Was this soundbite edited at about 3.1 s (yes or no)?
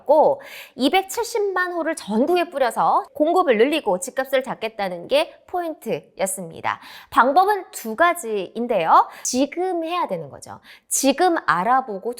yes